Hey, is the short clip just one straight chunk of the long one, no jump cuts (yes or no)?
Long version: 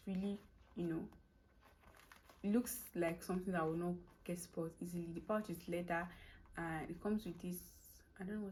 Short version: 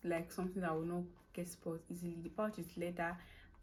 yes